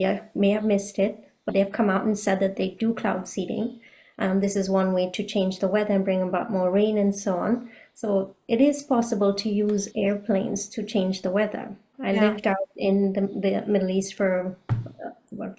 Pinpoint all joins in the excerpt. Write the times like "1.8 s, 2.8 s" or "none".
12.0 s